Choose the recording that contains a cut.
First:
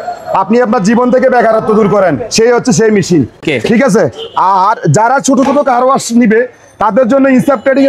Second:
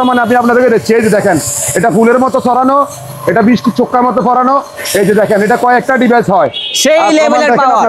first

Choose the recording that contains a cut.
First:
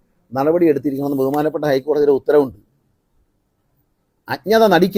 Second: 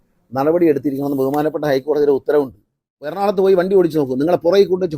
second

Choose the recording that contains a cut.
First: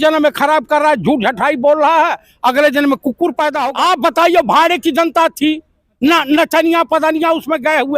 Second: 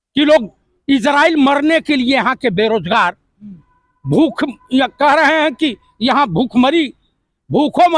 first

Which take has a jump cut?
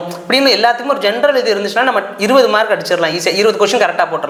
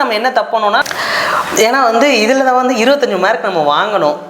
second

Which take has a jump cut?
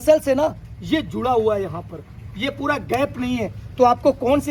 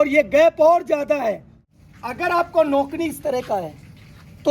second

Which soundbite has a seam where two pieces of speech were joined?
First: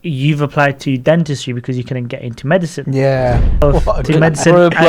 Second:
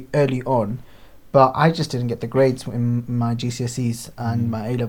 first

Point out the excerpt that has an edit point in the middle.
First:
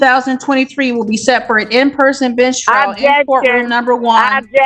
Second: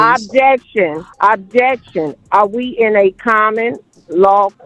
second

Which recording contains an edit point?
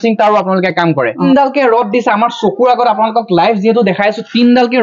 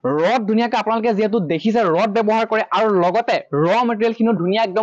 first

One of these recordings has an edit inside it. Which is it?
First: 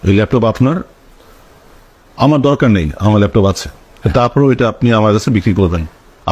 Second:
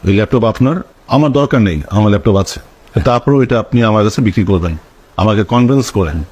second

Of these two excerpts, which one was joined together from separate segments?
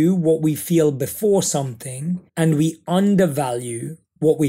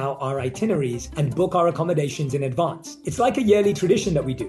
first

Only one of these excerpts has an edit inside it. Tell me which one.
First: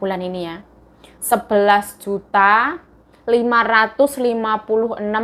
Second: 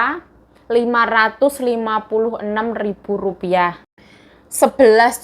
second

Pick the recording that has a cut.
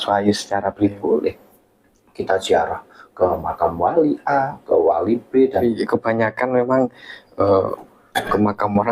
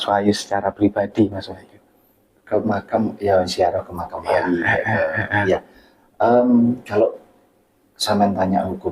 first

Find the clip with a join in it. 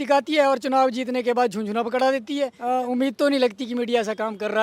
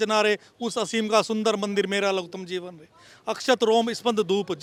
first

